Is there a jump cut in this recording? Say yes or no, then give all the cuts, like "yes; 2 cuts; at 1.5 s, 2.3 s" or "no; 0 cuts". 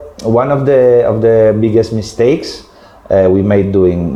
no; 0 cuts